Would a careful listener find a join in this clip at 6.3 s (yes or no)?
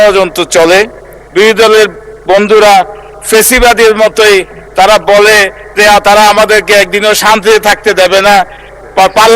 no